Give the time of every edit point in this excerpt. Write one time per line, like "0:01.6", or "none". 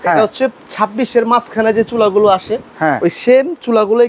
none